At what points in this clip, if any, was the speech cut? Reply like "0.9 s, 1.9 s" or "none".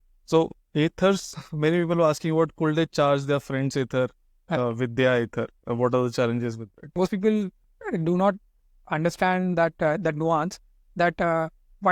1.3 s, 6.9 s